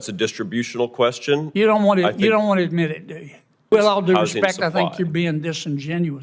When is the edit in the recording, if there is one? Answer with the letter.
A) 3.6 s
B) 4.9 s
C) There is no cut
A